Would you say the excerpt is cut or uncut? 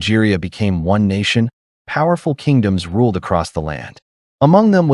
uncut